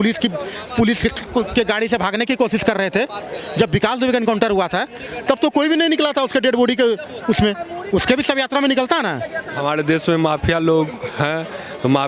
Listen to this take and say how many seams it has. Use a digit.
1